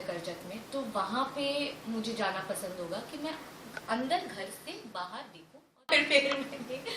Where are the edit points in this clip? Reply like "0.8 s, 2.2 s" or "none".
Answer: 5.9 s